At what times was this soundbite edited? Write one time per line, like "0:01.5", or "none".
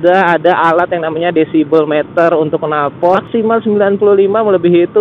0:03.3